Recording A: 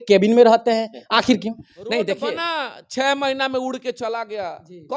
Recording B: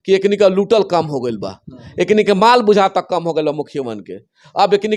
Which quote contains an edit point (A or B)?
A